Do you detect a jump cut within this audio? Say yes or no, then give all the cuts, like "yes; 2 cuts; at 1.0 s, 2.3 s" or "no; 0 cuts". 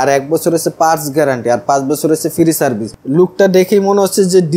yes; 1 cut; at 2.9 s